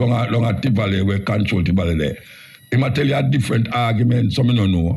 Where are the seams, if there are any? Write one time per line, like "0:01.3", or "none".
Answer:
none